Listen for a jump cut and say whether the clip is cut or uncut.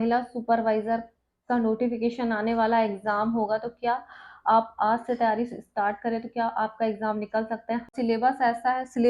cut